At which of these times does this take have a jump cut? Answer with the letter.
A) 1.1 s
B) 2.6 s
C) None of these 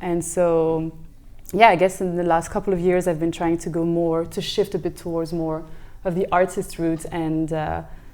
C